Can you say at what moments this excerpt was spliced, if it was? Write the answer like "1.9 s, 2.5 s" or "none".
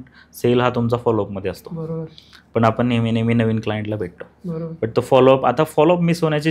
none